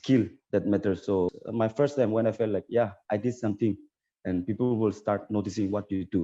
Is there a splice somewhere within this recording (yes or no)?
yes